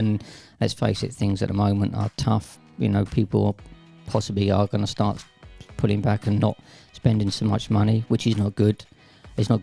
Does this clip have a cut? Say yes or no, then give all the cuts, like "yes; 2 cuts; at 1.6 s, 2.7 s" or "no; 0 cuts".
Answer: no; 0 cuts